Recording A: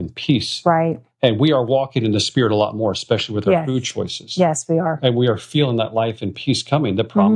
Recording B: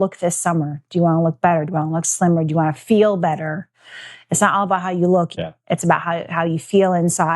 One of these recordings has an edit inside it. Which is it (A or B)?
B